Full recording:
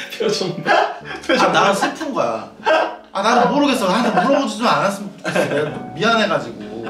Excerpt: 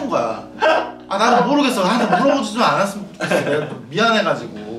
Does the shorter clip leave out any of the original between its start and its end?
no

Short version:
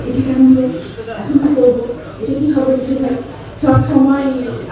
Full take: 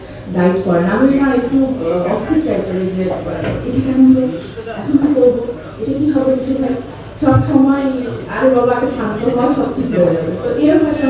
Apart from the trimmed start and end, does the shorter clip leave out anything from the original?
no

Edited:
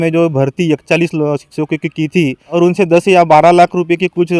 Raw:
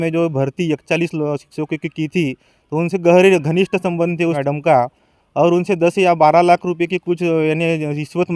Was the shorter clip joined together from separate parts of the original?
yes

